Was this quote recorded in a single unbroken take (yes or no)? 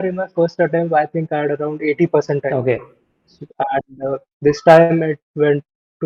yes